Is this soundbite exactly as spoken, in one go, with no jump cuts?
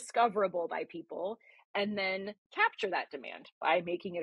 no; 1 cut; at 2.5 s

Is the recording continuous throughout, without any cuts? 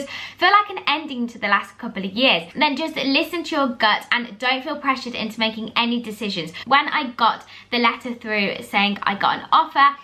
no; 2 cuts; at 2.5 s, 6.7 s

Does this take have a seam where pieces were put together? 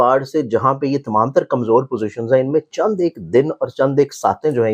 no; 0 cuts

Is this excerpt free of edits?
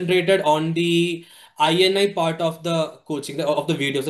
yes; 0 cuts

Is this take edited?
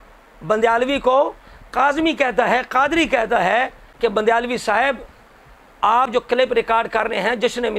no; 0 cuts

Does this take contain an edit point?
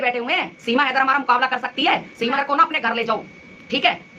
yes; 1 cut; at 2.3 s

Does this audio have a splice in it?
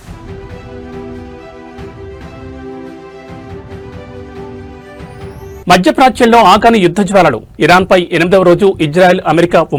no; 0 cuts

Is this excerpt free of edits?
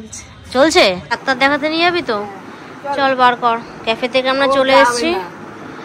no; 1 cut; at 1.2 s

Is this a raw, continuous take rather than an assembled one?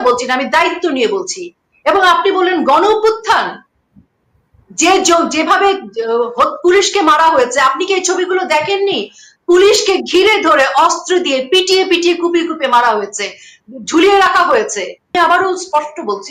no; 1 cut; at 15.1 s

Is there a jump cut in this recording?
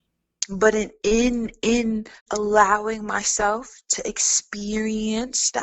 yes; 1 cut; at 2.2 s

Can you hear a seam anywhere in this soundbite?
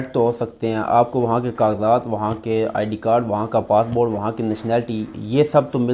no; 0 cuts

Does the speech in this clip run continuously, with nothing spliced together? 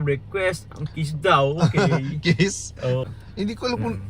no; 1 cut; at 3.0 s

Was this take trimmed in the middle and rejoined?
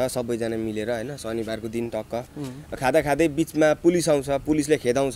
no; 0 cuts

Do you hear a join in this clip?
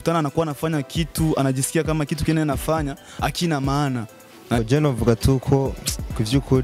yes; 1 cut; at 4.6 s

